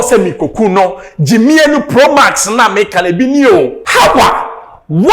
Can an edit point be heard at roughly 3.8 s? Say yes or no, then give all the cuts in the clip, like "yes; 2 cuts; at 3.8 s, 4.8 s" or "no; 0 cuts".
yes; 1 cut; at 3.8 s